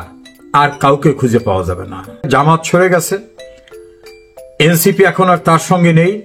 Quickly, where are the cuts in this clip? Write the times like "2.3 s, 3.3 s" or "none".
2.2 s